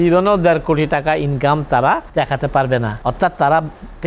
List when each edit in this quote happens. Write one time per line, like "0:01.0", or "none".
0:02.1
0:02.9